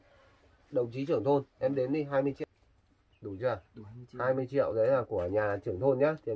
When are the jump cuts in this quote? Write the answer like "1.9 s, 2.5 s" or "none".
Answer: 2.4 s